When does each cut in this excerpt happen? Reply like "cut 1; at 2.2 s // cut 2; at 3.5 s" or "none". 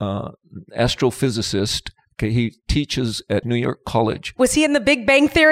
cut 1; at 3.4 s